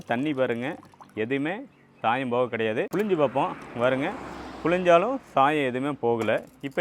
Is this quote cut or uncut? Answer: cut